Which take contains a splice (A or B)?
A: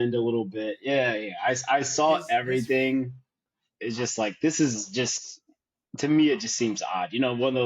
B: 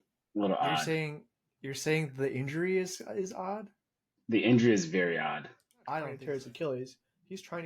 B